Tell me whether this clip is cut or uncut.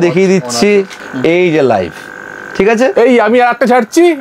cut